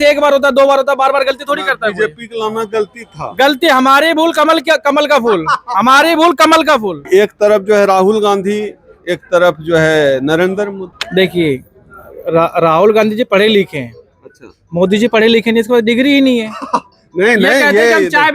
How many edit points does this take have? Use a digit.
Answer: 2